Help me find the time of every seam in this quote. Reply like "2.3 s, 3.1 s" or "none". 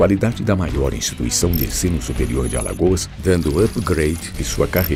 none